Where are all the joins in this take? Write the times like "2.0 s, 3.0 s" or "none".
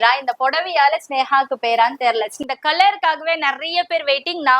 2.4 s